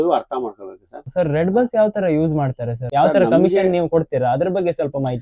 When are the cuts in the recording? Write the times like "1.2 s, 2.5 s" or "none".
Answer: 1.0 s, 2.7 s